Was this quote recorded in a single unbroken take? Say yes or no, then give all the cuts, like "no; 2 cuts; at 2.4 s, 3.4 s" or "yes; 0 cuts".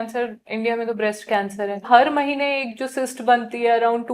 no; 1 cut; at 1.9 s